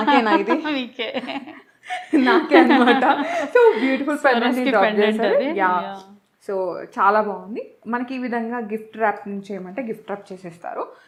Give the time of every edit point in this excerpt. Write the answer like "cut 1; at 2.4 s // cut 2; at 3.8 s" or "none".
none